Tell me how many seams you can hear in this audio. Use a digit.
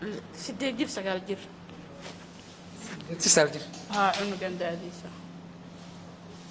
0